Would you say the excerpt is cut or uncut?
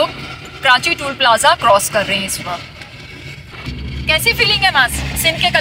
cut